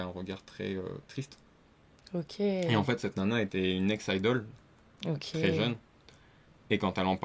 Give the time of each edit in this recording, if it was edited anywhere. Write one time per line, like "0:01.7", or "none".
none